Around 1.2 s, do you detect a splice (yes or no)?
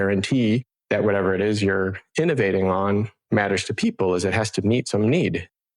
no